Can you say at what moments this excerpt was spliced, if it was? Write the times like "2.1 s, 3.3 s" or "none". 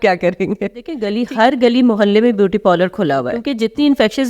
1.0 s, 3.5 s